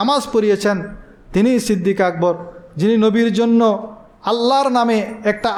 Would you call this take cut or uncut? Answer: uncut